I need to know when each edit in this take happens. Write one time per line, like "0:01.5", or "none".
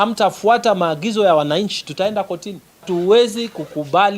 0:02.8